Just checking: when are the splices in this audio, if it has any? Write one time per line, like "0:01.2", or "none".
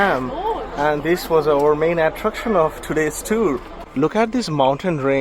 0:03.7